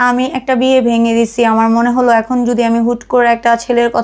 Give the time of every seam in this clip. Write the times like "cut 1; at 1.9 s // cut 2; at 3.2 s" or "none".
none